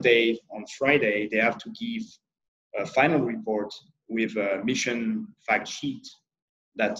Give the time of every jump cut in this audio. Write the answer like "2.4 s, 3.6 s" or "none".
none